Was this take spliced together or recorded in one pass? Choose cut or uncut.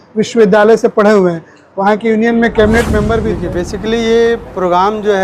cut